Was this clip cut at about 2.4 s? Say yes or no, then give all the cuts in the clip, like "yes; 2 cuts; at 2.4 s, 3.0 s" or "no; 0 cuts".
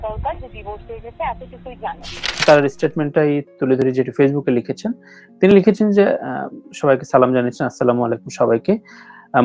yes; 1 cut; at 2.4 s